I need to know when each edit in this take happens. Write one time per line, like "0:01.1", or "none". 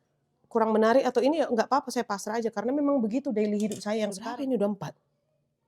0:04.2